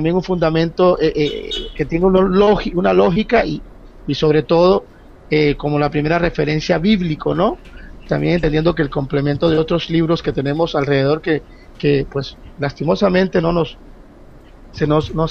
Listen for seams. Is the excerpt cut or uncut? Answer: cut